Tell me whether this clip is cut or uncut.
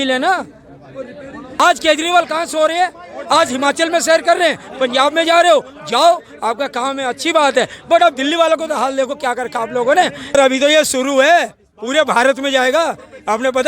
cut